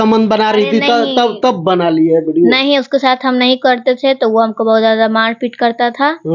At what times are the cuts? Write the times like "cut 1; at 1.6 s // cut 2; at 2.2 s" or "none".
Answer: none

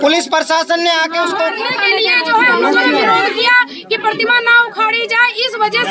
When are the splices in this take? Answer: cut 1; at 1.5 s

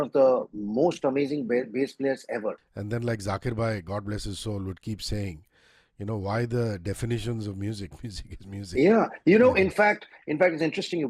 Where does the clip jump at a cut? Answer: cut 1; at 2.7 s

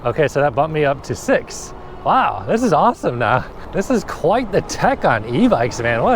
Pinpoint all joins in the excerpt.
cut 1; at 3.6 s

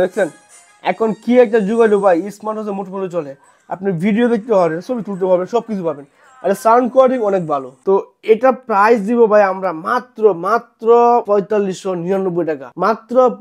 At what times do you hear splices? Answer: none

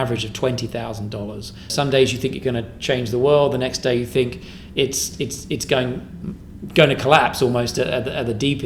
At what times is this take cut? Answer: cut 1; at 1.7 s

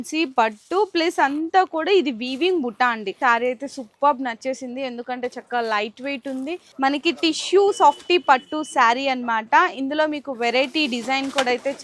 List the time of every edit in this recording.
cut 1; at 3.1 s // cut 2; at 6.6 s

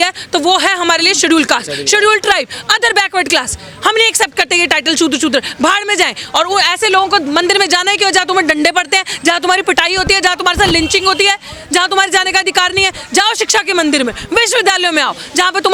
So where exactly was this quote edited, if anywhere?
none

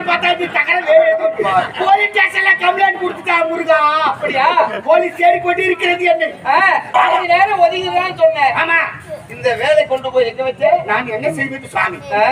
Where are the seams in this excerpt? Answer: cut 1; at 7.2 s

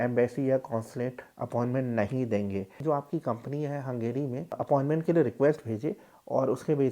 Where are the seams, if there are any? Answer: cut 1; at 2.8 s // cut 2; at 4.6 s

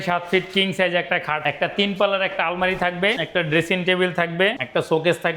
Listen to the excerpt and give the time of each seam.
cut 1; at 1.4 s // cut 2; at 3.2 s // cut 3; at 4.6 s

